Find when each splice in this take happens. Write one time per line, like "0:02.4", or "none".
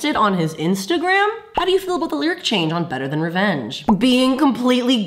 0:01.5
0:03.8

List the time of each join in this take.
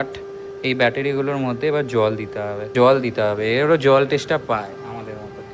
0:02.7

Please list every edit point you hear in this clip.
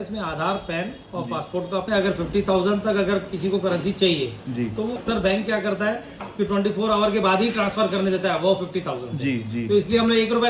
0:01.9
0:04.9

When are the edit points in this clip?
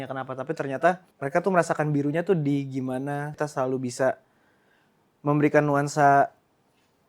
0:01.1
0:03.3

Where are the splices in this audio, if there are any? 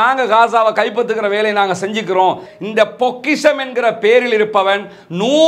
0:02.5

